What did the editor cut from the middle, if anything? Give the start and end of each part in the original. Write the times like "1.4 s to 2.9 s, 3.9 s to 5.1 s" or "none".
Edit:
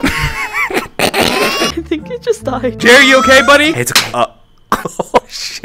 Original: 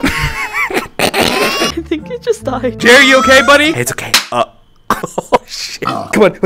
4.0 s to 4.2 s